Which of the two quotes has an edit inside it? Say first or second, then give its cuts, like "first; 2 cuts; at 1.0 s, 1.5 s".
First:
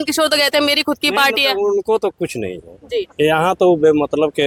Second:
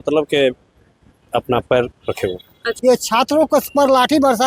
second; 1 cut; at 2.7 s